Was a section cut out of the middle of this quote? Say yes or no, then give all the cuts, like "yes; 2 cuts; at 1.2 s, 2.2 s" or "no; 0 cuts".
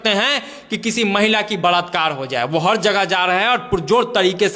no; 0 cuts